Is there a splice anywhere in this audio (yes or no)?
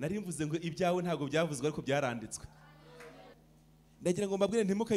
yes